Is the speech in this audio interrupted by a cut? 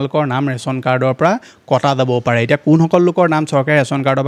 no; 0 cuts

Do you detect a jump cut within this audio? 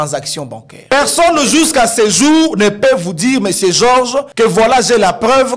yes; 2 cuts; at 0.9 s, 4.3 s

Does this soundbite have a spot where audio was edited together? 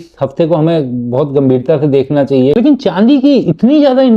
yes; 1 cut; at 2.5 s

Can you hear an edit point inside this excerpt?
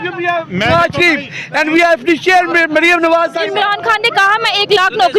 yes; 1 cut; at 3.4 s

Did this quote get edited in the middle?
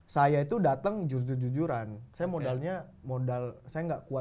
no; 0 cuts

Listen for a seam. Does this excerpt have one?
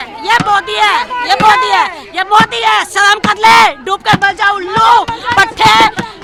no; 0 cuts

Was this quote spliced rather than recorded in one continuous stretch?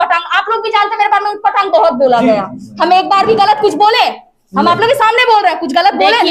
no; 0 cuts

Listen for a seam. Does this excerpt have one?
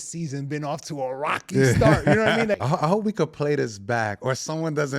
yes; 1 cut; at 2.5 s

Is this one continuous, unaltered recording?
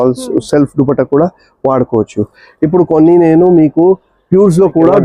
yes; 0 cuts

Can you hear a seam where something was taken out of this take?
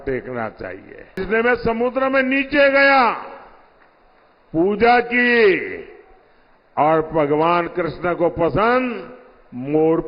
yes; 1 cut; at 1.2 s

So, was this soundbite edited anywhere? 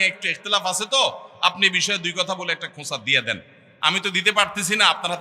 no; 0 cuts

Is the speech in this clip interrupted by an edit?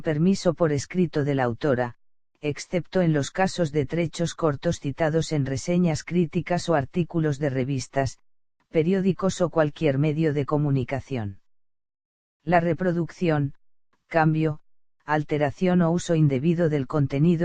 yes; 1 cut; at 6.6 s

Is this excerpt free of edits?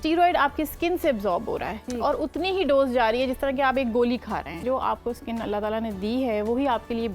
no; 1 cut; at 4.6 s

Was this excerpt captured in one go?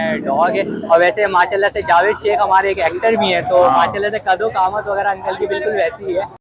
yes; 0 cuts

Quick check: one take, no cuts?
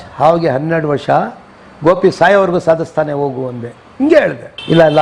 yes; 0 cuts

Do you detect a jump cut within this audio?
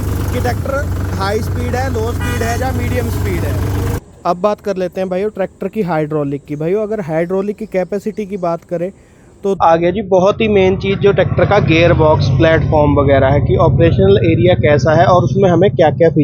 yes; 2 cuts; at 4.0 s, 9.6 s

